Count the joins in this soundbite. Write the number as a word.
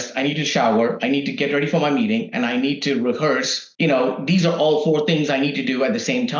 one